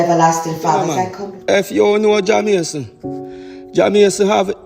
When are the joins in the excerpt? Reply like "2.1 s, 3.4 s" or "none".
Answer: 1.1 s